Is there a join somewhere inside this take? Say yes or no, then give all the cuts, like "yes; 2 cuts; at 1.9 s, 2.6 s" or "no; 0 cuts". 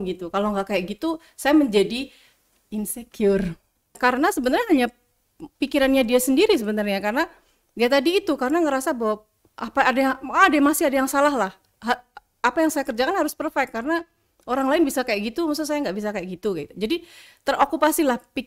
yes; 1 cut; at 4.0 s